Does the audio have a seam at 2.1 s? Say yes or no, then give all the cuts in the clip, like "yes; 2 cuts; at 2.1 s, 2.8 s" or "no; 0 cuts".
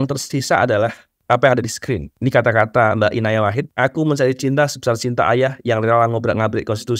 yes; 3 cuts; at 1.1 s, 2.1 s, 3.6 s